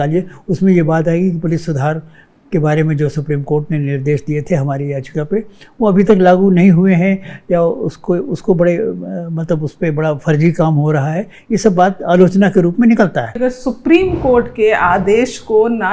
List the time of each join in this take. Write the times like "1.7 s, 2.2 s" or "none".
13.4 s